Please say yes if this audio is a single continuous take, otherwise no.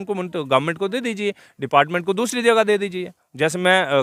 yes